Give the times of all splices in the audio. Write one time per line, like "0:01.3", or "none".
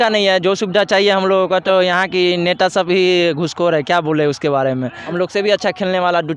0:01.6
0:05.0